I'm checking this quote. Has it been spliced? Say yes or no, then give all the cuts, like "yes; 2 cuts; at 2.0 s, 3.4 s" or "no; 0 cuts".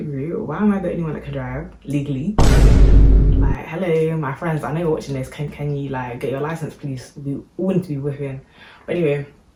no; 0 cuts